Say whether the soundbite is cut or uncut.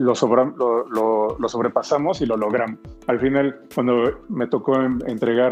uncut